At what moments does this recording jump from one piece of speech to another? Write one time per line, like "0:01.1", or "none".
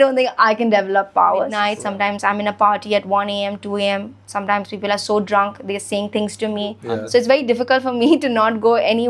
0:01.5
0:06.8